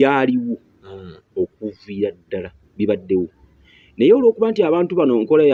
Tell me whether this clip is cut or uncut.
uncut